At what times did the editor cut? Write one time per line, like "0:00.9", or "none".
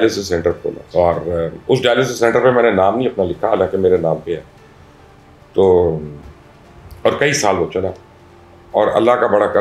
none